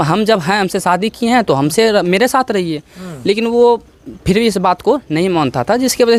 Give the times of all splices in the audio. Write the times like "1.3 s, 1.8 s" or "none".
none